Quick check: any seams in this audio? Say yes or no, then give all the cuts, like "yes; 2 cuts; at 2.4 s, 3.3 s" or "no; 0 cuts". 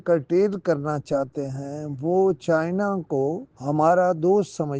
yes; 1 cut; at 3.5 s